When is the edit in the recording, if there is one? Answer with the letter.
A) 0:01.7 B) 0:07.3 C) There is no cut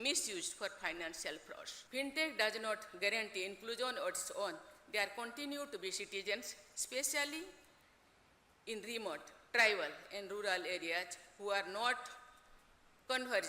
A